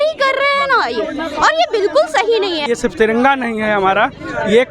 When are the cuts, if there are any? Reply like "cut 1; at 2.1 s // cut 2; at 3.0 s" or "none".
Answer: cut 1; at 2.6 s